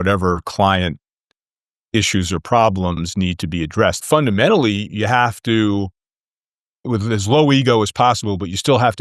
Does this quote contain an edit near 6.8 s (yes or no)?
yes